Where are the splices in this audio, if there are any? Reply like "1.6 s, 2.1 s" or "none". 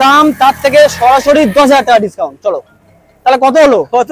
none